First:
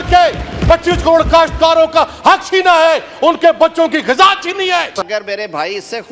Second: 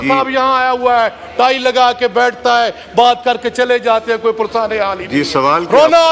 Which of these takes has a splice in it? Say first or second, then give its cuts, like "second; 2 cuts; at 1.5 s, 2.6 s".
first; 1 cut; at 5.0 s